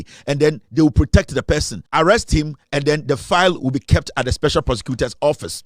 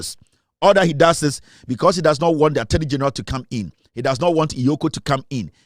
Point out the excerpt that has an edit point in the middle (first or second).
first